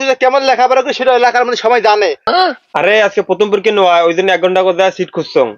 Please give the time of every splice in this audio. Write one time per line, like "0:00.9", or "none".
0:02.3